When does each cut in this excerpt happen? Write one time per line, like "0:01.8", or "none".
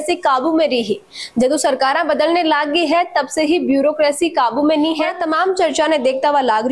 0:05.2